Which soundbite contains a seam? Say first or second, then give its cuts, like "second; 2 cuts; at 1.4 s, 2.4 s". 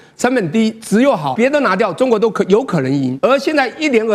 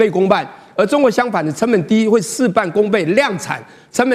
first; 2 cuts; at 1.3 s, 3.1 s